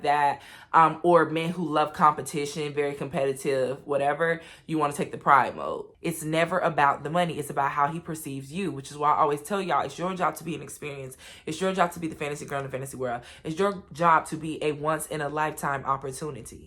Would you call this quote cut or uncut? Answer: cut